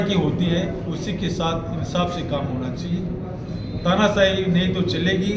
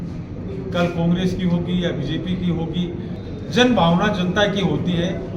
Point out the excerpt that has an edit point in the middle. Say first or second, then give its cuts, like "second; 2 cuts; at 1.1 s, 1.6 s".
second; 1 cut; at 3.2 s